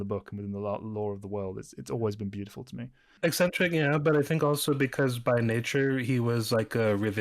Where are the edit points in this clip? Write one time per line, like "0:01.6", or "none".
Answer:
0:03.1